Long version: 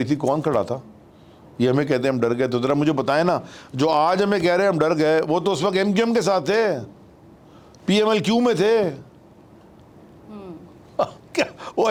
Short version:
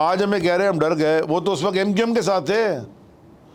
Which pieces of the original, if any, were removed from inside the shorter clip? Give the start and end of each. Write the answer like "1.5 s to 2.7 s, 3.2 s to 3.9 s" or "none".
none

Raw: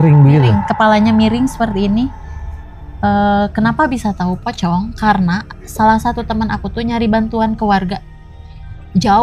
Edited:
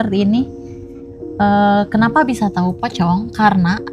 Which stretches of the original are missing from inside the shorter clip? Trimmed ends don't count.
none

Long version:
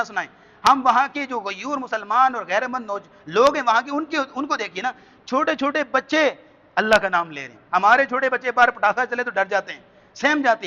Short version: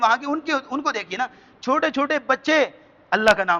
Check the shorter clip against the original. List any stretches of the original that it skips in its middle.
none

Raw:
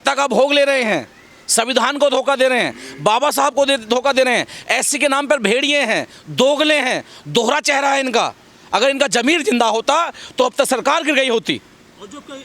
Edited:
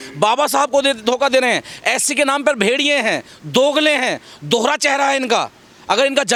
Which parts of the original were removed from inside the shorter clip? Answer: none

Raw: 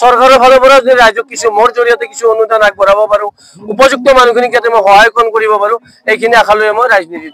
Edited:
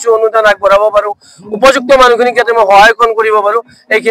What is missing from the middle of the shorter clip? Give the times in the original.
none

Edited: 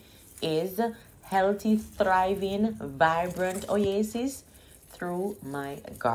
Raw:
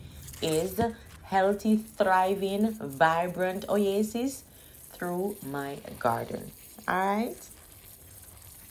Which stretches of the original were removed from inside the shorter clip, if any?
none

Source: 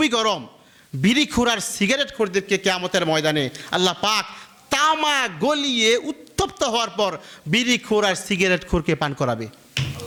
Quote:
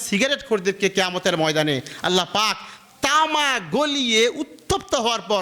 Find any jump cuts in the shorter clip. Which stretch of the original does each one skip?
none

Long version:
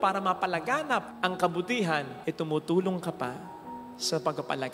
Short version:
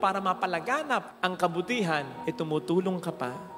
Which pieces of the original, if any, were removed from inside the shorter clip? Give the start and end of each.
none

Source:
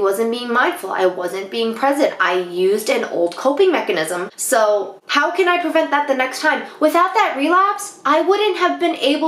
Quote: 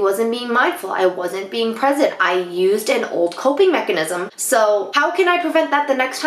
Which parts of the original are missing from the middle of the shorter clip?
4.9 s to 5.1 s

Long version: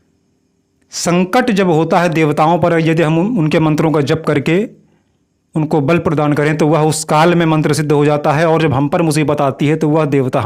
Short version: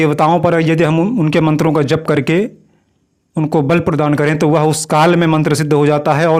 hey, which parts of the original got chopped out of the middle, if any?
none

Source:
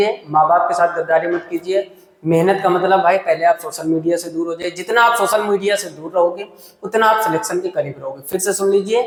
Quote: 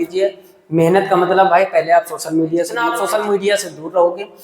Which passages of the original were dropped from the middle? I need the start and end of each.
4.5 s to 5.1 s

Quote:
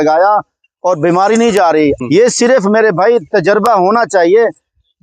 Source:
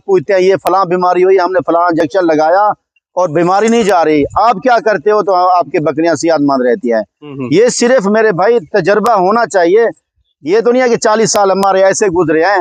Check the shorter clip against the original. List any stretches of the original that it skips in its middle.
4.3 s to 7.4 s

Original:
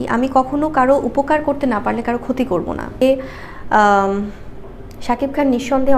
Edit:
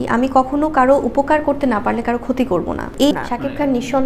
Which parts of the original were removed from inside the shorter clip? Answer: 2.9 s to 4.7 s

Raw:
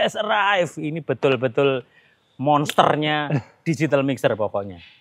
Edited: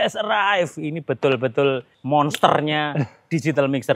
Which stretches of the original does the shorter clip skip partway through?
1.9 s to 2.3 s

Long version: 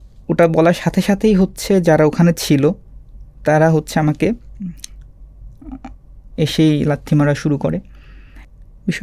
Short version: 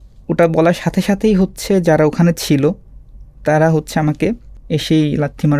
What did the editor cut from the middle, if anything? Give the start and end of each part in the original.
4.5 s to 6.2 s

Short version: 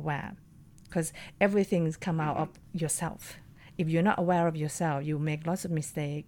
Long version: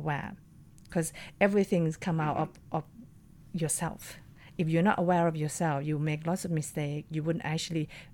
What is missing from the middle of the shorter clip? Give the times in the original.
2.6 s to 3.4 s

